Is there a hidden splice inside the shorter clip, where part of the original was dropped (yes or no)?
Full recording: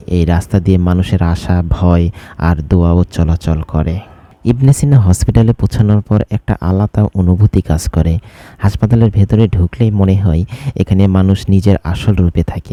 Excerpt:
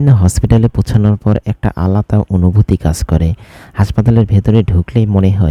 no